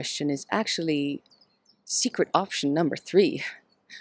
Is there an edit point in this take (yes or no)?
no